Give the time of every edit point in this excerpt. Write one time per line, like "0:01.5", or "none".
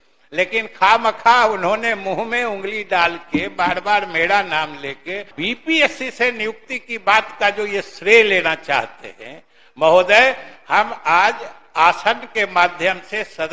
0:05.3